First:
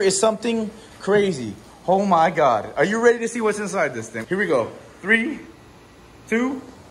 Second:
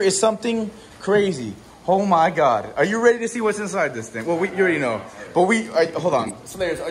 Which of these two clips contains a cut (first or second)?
first